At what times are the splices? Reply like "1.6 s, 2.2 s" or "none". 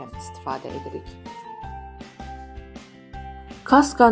none